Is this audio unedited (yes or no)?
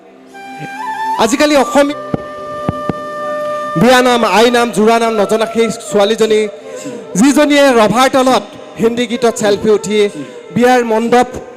no